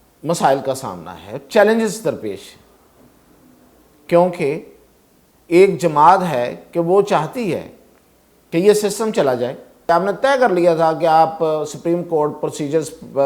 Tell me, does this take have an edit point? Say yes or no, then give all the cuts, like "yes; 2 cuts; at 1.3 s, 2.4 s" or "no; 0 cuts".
yes; 1 cut; at 9.9 s